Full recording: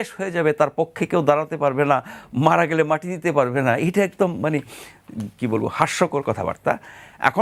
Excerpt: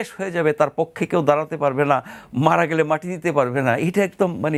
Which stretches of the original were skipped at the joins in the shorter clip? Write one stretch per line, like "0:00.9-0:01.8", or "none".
none